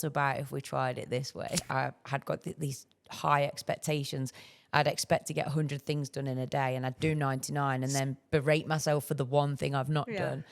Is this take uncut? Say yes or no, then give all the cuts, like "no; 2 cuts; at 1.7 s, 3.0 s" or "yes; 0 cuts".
no; 1 cut; at 1.6 s